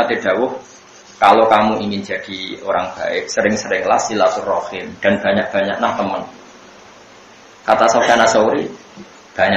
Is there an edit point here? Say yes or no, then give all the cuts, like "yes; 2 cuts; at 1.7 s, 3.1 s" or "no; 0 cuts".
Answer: no; 0 cuts